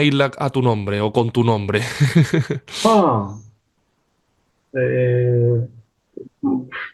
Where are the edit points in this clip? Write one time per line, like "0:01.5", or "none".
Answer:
none